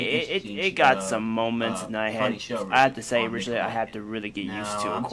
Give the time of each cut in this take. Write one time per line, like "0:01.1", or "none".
0:03.2

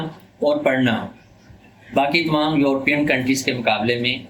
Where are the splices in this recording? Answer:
none

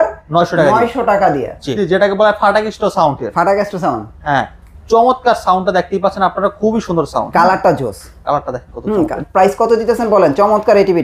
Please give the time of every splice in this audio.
0:01.7
0:09.2

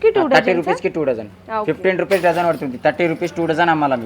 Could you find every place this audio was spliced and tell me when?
none

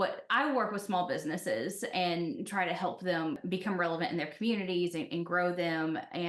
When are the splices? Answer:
0:03.4

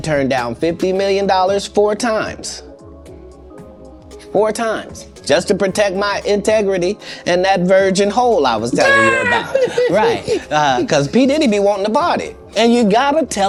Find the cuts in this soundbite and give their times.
none

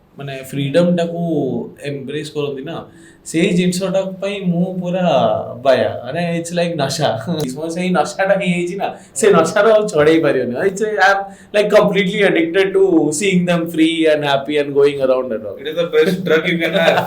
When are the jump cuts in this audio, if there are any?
0:07.4

